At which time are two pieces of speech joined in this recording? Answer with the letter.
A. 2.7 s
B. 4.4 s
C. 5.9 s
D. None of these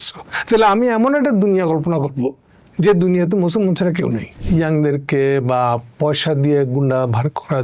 B